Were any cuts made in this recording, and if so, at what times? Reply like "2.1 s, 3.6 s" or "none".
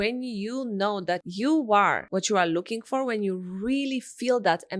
1.3 s, 2.0 s